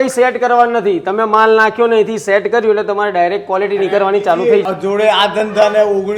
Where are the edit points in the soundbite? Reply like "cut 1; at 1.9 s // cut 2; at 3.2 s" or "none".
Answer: cut 1; at 4.6 s